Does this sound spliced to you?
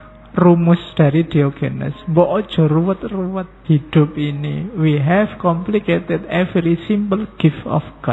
yes; 1 cut; at 3.5 s

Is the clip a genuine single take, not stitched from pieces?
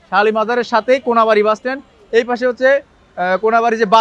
yes; 0 cuts

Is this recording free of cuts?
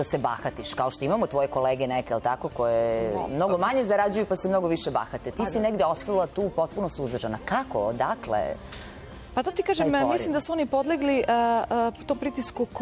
yes; 0 cuts

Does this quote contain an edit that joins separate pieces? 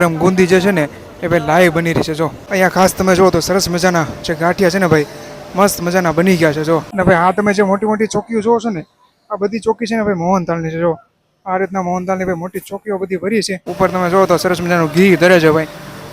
yes; 3 cuts; at 2.4 s, 6.9 s, 13.7 s

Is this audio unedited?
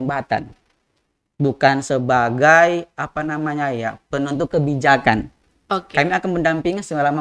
yes; 0 cuts

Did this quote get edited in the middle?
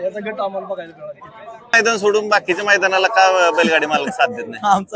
yes; 1 cut; at 1.7 s

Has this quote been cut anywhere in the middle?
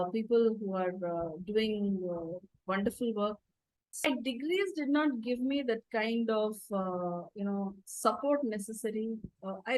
yes; 1 cut; at 4.0 s

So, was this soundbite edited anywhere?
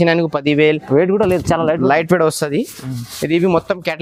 no; 0 cuts

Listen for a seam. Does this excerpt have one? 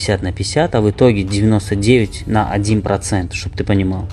no; 0 cuts

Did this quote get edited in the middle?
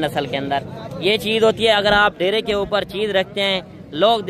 no; 0 cuts

